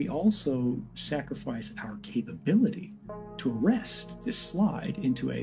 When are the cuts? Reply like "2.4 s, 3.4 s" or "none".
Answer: none